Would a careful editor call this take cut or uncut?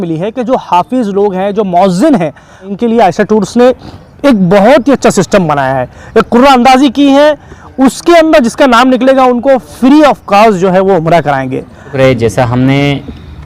cut